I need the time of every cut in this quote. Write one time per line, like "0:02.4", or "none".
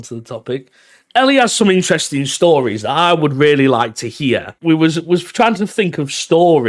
0:04.5